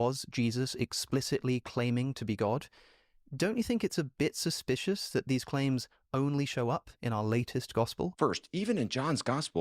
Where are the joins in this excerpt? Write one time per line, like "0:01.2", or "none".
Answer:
0:08.1